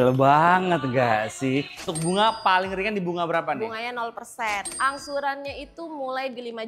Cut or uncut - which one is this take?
cut